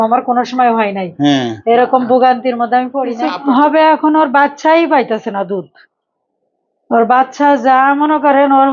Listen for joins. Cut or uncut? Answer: cut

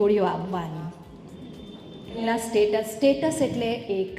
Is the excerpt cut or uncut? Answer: cut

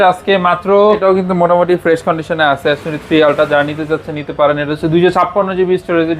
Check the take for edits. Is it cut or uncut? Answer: cut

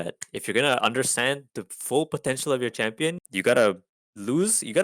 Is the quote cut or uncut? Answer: cut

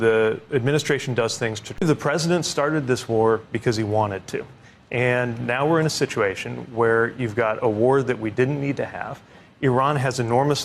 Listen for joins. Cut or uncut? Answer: cut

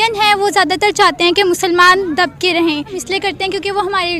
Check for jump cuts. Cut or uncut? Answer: cut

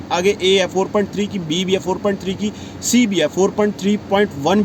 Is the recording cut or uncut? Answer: uncut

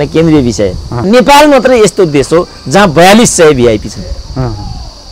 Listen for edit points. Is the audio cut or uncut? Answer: cut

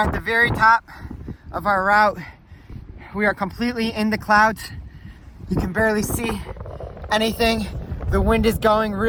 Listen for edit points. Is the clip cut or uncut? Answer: uncut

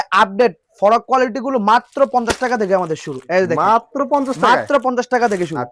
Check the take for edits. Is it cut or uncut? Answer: uncut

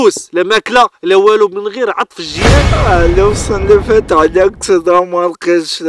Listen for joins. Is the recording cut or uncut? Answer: cut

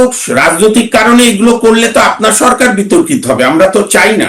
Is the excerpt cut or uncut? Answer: uncut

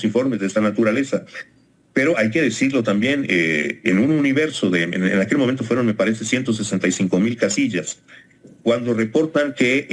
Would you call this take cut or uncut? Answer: uncut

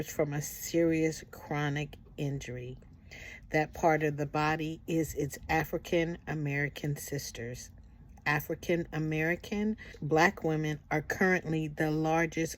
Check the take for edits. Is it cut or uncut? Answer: cut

